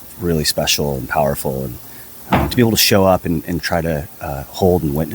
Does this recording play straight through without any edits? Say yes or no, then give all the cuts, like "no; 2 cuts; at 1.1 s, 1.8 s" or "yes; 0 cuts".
yes; 0 cuts